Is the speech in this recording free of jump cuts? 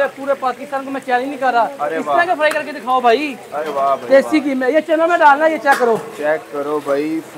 yes; 0 cuts

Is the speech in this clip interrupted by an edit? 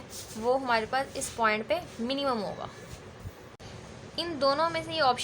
yes; 1 cut; at 3.5 s

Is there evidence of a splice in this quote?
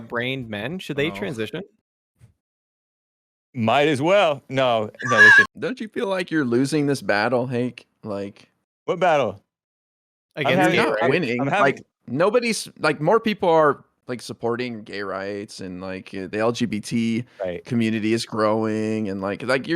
yes; 1 cut; at 5.5 s

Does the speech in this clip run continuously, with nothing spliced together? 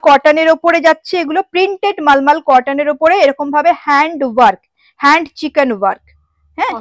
yes; 0 cuts

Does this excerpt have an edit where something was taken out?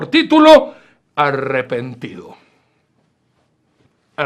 no; 0 cuts

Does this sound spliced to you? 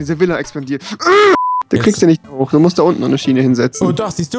yes; 1 cut; at 1.4 s

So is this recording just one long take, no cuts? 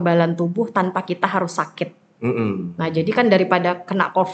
yes; 0 cuts

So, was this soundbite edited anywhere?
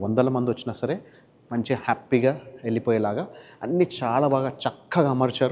no; 0 cuts

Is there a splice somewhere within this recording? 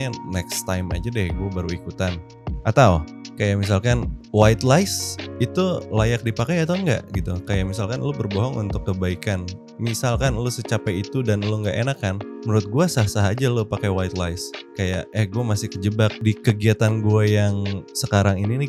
no; 0 cuts

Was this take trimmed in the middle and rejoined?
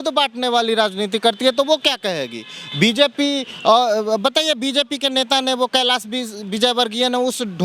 no; 0 cuts

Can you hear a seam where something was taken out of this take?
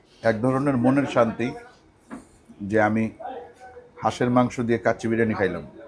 no; 0 cuts

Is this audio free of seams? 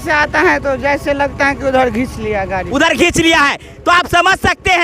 yes; 0 cuts

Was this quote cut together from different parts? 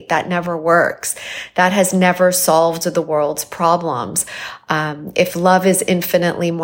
no; 0 cuts

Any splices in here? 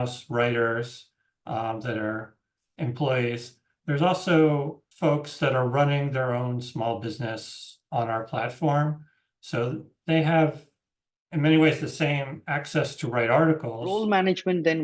yes; 2 cuts; at 4.8 s, 13.9 s

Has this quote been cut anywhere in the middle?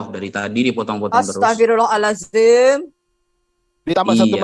no; 0 cuts

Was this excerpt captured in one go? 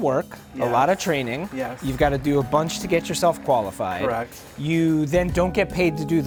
yes; 0 cuts

